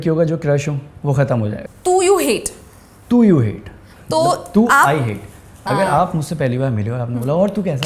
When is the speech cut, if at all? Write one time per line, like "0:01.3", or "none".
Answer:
0:01.6

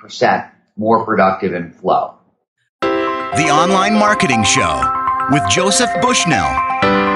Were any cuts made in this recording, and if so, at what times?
0:02.6

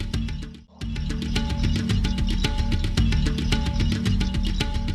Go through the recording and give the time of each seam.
none

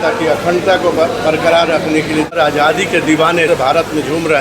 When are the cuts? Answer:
0:02.4
0:03.5

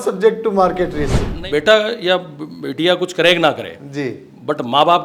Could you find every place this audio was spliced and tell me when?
none

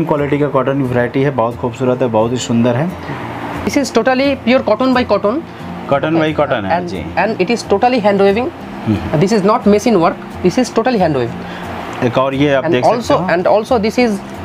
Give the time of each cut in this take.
0:03.7
0:11.7

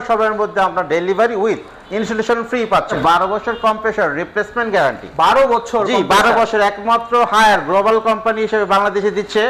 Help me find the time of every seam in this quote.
0:02.9

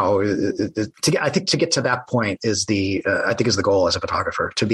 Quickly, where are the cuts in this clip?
0:00.9

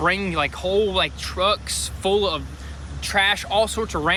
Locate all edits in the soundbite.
none

